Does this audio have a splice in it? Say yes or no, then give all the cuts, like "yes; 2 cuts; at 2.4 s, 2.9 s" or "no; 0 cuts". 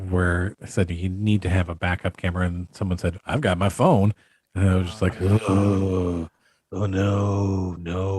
no; 0 cuts